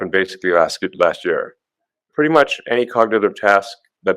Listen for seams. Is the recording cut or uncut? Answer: cut